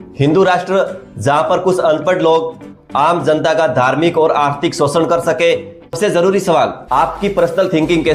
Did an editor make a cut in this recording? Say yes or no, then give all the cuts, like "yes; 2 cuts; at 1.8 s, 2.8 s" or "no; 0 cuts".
yes; 1 cut; at 5.9 s